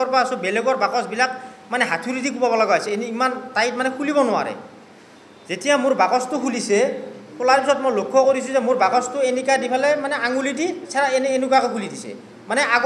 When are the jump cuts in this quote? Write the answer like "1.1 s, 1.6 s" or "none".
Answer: none